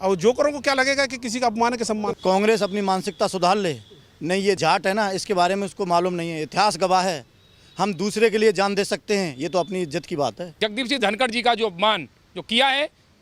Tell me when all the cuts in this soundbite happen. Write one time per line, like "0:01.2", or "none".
0:02.2
0:04.6
0:10.6